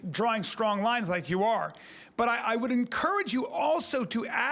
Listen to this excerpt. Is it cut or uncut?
uncut